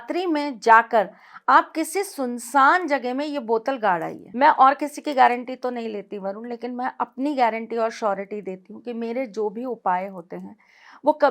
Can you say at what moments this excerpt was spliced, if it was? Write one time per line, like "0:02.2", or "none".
0:04.2